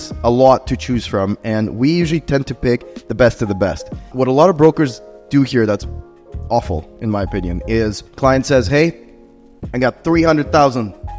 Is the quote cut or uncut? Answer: uncut